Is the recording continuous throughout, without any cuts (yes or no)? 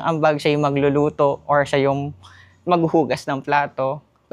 yes